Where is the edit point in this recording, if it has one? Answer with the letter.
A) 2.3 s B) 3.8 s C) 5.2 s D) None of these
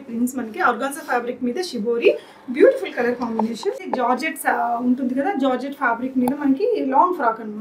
B